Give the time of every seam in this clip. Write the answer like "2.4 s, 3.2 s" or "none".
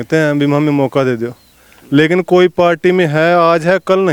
none